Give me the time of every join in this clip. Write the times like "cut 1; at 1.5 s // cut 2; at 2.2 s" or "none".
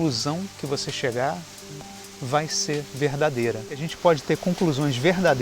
cut 1; at 3.9 s